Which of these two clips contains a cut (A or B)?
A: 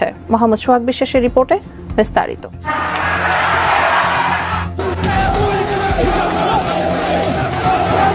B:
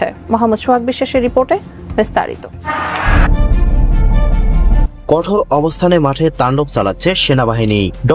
B